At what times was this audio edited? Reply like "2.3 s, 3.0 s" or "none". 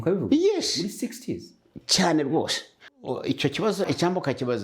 2.7 s